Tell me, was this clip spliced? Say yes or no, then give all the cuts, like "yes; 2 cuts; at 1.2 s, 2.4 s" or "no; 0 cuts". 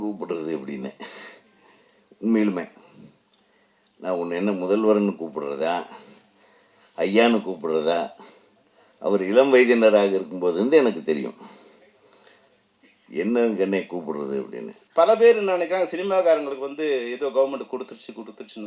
yes; 1 cut; at 14.7 s